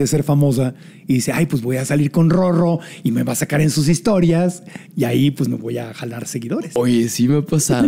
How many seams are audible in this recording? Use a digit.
1